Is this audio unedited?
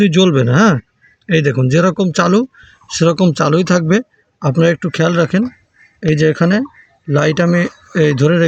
yes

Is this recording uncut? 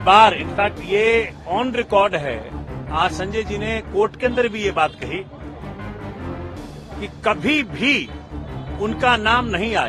yes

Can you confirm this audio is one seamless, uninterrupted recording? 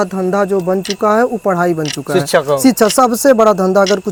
yes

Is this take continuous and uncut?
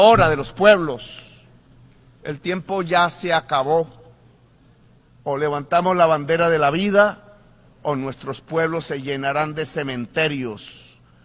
yes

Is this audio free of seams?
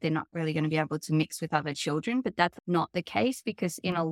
no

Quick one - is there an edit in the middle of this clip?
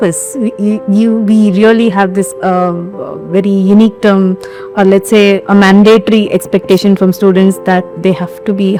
no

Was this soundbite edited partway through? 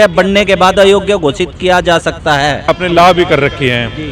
yes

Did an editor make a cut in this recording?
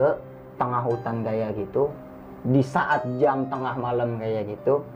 no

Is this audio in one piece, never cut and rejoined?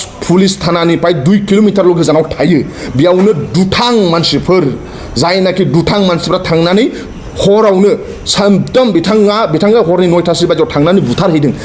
yes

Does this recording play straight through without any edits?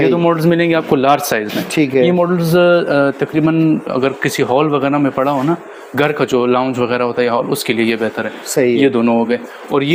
yes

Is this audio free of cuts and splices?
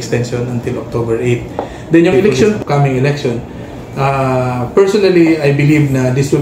no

